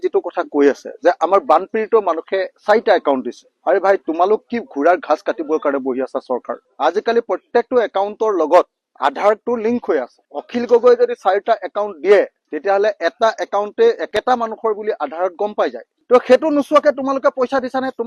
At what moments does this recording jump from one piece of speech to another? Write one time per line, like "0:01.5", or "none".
none